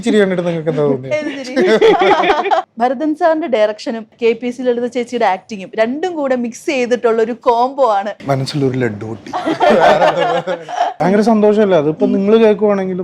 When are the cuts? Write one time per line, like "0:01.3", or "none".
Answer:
0:02.7
0:04.1
0:08.2
0:11.0